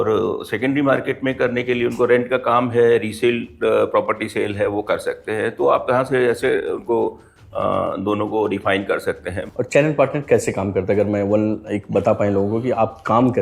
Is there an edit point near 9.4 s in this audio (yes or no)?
yes